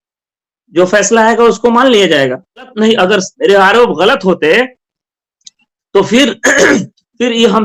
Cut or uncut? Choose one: cut